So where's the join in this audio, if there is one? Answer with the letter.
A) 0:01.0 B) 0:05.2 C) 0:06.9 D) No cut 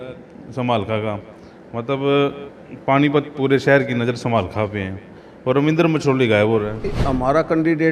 C